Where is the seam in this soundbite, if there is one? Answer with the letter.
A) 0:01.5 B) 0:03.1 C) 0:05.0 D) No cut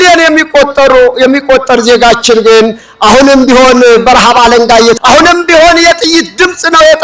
C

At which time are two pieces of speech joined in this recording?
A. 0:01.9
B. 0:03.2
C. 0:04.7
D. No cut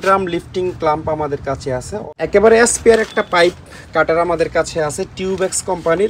A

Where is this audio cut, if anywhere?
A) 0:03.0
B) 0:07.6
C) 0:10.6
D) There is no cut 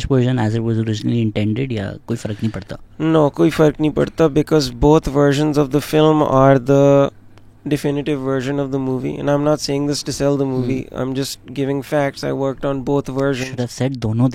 D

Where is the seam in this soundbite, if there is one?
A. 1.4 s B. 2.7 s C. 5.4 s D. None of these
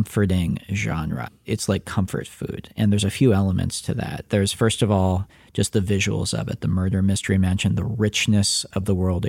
A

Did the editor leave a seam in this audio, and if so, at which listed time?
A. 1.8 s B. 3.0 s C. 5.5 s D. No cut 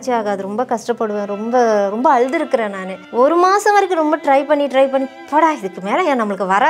B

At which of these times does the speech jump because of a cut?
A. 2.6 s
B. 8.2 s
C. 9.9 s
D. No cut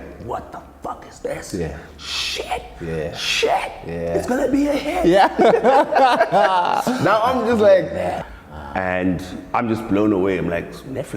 B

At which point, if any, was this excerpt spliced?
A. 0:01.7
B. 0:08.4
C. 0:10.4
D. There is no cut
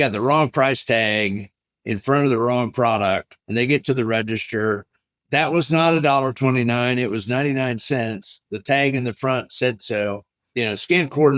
C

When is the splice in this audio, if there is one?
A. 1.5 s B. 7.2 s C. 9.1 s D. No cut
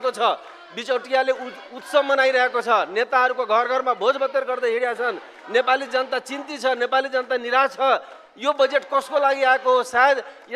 D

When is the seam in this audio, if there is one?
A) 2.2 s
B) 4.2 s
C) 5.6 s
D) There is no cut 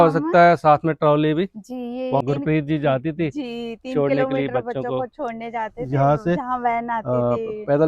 A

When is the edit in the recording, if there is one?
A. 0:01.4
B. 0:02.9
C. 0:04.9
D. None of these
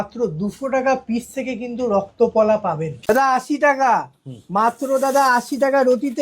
B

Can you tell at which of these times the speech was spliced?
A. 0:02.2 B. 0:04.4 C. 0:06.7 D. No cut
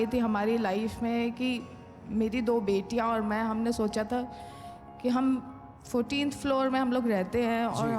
D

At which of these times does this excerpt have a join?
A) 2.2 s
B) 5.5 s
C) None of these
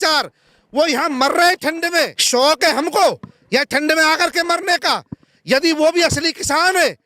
A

